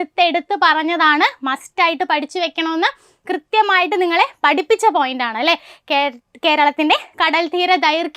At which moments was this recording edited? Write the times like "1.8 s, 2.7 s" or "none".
none